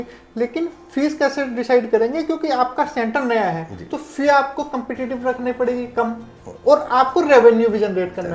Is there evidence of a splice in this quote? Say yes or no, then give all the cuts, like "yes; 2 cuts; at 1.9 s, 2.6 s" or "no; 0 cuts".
no; 0 cuts